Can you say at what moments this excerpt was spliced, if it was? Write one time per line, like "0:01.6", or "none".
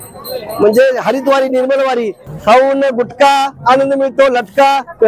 0:02.2

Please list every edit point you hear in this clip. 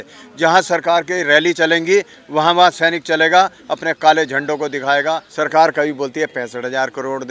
0:05.3

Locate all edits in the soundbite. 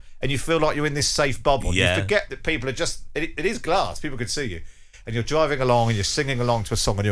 none

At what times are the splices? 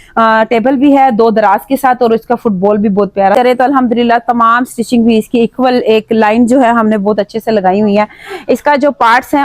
0:03.3

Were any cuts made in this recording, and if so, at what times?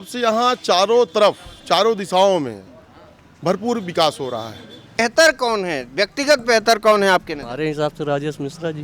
0:05.0

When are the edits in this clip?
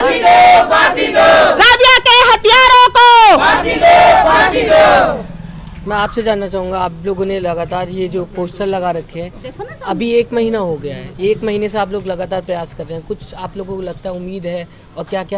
none

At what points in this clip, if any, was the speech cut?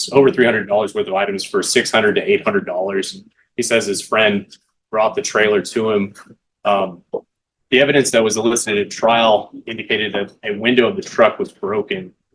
0:01.8

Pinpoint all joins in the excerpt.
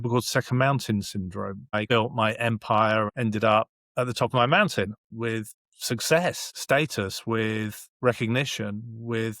0:01.8
0:03.1
0:05.1
0:06.5

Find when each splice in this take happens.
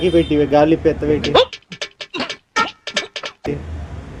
none

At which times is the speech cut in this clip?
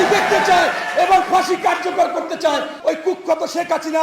0:02.7

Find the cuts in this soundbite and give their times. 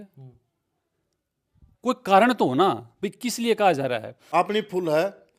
0:04.1

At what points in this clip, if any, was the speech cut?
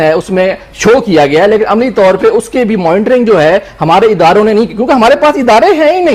none

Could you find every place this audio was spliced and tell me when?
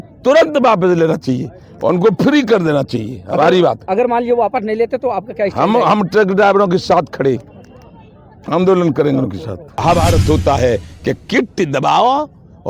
0:09.8

